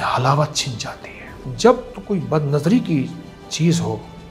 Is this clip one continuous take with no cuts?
no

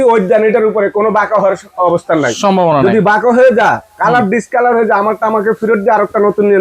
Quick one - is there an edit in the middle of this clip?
no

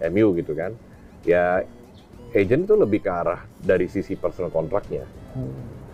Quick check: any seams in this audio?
no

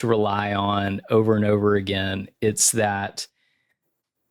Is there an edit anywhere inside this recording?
no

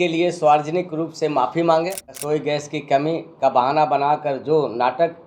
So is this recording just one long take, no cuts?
no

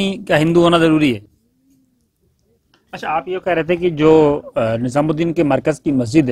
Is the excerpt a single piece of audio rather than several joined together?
no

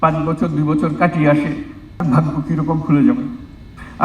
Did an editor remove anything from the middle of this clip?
yes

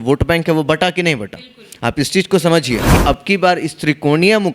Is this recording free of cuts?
no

